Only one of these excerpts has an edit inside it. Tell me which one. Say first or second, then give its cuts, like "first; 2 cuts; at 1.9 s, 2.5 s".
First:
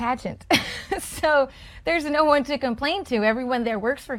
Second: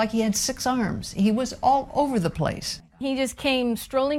second; 1 cut; at 2.7 s